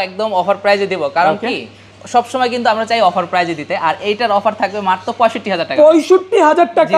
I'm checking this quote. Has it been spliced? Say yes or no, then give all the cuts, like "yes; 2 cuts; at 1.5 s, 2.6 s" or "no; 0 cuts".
no; 0 cuts